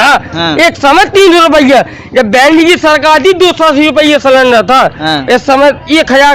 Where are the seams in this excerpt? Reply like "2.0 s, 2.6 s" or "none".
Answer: none